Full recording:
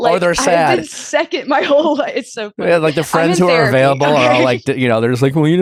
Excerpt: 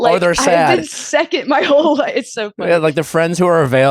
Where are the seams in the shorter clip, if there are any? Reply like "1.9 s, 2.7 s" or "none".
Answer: none